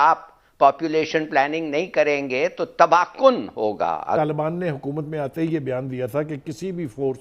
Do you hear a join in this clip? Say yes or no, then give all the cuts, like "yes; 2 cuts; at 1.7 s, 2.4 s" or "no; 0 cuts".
yes; 1 cut; at 4.2 s